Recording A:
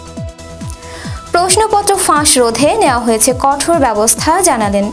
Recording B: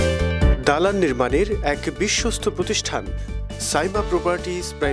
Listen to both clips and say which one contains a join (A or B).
A